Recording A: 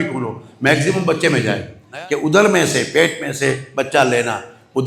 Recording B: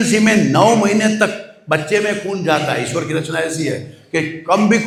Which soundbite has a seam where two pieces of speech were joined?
A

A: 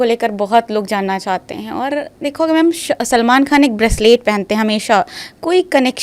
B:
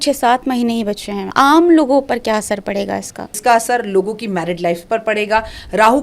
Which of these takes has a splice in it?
B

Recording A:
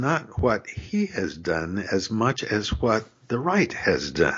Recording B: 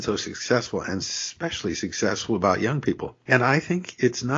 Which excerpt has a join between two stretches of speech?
B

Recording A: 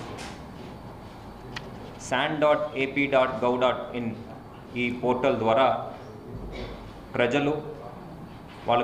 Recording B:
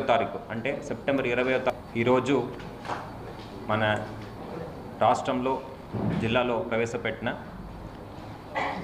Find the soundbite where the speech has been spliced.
B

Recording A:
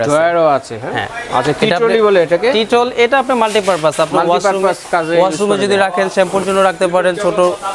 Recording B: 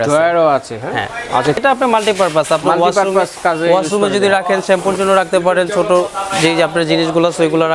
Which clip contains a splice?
B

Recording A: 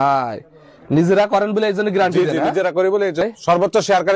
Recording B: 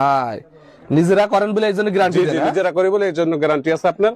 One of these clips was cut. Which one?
A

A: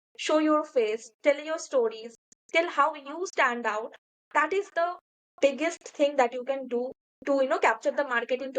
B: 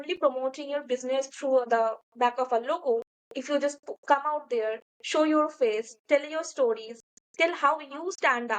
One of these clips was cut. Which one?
B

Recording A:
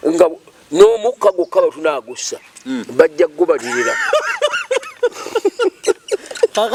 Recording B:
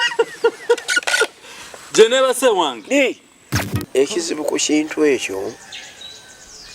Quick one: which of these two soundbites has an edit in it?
B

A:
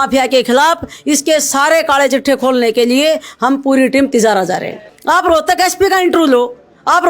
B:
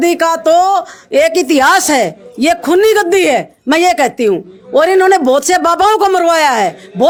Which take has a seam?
A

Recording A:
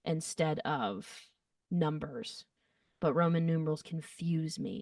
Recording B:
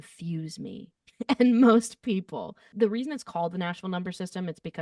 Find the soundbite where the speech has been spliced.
B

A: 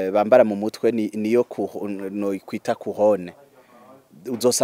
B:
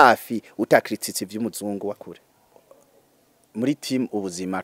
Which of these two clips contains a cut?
B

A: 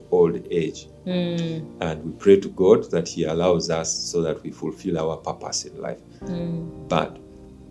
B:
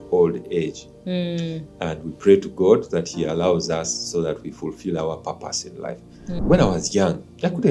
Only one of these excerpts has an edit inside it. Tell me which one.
B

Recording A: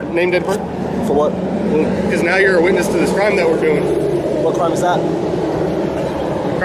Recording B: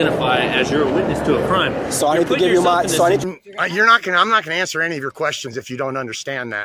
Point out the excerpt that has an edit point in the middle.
B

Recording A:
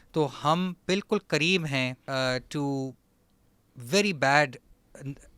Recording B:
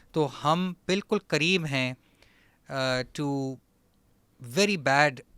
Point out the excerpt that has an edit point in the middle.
A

